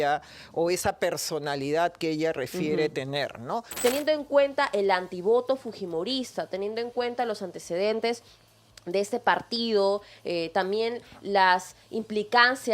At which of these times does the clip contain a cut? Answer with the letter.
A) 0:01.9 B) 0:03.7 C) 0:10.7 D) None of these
B